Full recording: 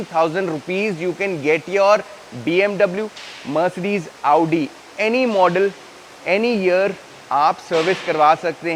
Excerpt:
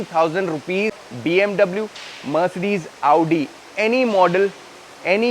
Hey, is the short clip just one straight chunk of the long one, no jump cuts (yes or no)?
no